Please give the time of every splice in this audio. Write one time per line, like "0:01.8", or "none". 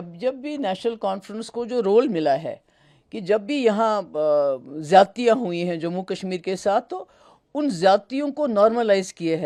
none